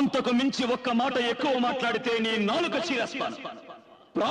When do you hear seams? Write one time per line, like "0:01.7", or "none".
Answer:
none

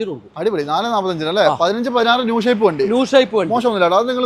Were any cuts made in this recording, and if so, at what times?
none

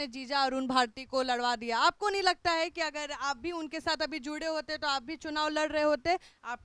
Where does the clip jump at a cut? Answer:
none

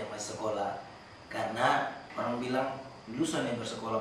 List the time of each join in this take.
0:02.0
0:02.9

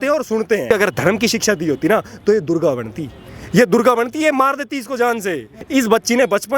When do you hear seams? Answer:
0:00.7
0:05.5

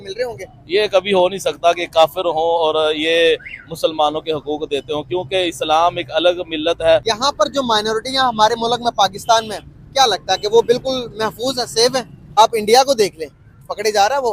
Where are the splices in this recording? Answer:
0:07.1
0:12.3

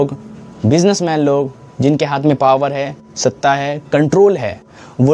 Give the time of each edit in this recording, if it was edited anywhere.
none

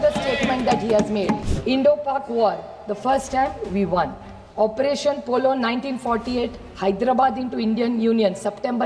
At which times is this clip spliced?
0:01.5

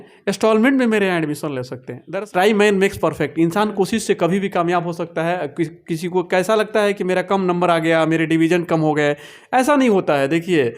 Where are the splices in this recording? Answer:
0:01.9

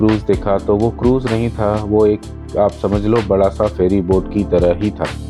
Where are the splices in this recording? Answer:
none

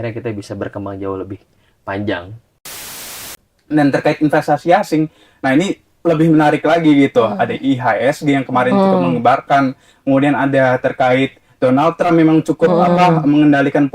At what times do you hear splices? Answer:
0:03.0

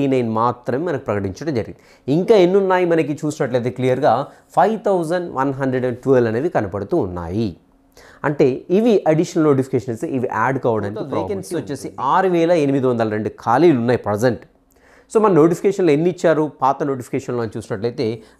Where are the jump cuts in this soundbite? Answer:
0:11.4

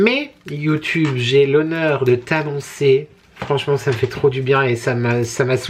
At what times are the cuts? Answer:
none

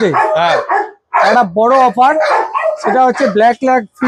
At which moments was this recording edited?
none

